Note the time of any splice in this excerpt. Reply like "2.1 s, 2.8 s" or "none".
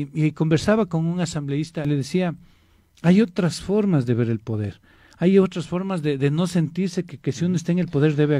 1.9 s